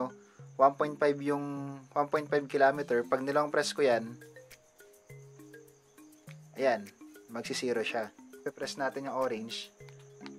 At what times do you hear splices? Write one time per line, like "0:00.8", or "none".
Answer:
0:08.5